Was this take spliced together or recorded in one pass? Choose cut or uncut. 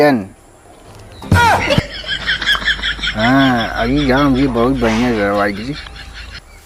uncut